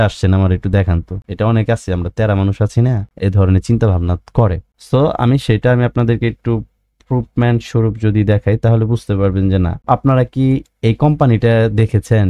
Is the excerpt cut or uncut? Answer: cut